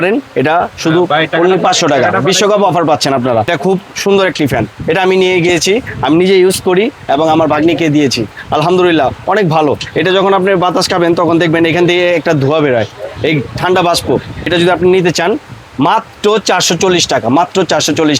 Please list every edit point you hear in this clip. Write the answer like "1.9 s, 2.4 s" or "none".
3.5 s, 14.5 s